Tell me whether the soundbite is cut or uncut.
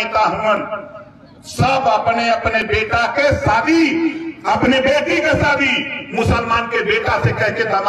uncut